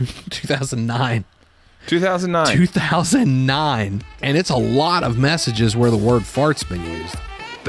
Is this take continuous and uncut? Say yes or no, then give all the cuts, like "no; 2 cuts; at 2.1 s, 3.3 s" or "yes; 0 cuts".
no; 2 cuts; at 4.2 s, 6.7 s